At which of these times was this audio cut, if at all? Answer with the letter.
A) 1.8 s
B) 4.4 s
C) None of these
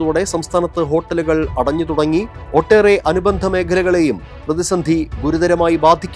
C